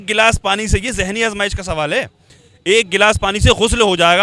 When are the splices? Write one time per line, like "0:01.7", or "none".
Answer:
none